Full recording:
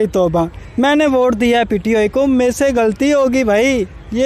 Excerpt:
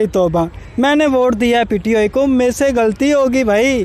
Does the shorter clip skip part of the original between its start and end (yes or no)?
no